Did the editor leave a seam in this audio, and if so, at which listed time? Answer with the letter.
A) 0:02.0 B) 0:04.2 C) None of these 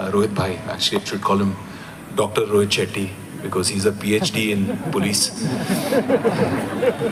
C